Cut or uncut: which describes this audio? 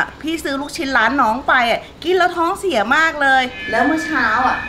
uncut